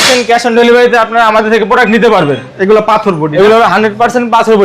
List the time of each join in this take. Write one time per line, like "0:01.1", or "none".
0:02.5